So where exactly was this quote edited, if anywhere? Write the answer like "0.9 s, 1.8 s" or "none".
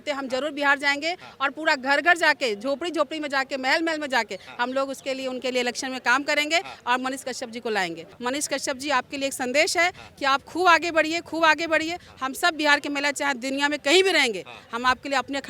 8.1 s

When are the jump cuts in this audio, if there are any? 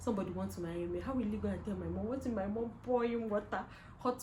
none

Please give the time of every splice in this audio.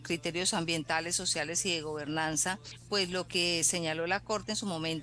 2.7 s

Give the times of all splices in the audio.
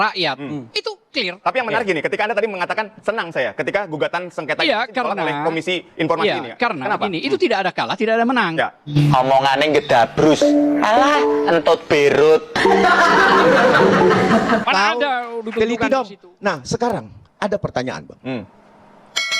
14.6 s

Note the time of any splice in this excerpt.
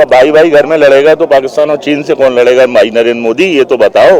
none

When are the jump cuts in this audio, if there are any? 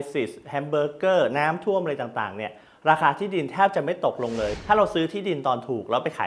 4.5 s

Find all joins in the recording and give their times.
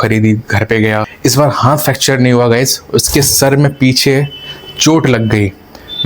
1.1 s

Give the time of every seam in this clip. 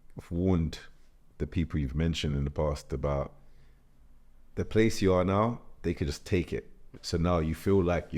7.0 s

